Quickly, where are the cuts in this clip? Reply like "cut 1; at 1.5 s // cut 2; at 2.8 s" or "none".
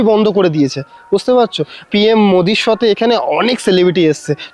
none